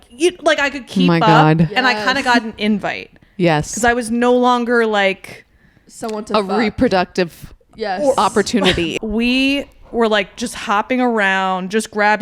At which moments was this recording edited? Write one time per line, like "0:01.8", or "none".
0:08.9